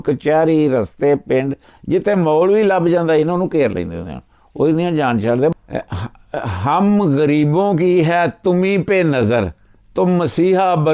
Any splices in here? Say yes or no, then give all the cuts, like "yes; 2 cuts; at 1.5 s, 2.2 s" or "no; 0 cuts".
yes; 1 cut; at 5.5 s